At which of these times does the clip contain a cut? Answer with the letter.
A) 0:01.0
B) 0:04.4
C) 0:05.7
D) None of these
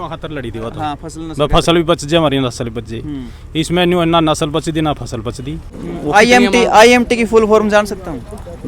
C